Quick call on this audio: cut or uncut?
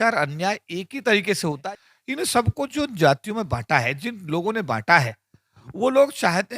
cut